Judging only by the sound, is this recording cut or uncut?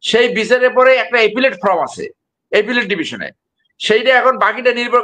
uncut